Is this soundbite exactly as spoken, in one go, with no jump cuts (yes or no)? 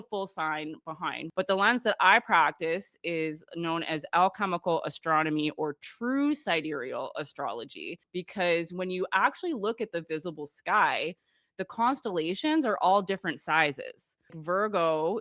no